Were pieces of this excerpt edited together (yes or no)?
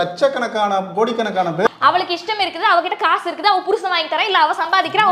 yes